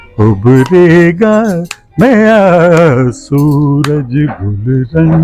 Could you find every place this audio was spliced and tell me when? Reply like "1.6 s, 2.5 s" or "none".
none